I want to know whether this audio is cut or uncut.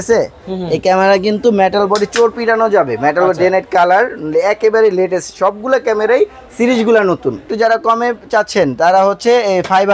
cut